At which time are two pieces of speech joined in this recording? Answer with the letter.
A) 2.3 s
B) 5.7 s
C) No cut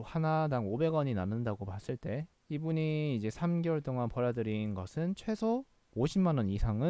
C